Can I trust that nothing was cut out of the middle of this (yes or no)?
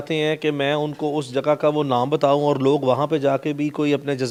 yes